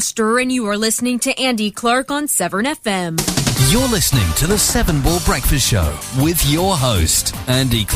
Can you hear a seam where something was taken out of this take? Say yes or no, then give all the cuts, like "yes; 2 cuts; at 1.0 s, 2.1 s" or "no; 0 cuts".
yes; 1 cut; at 3.2 s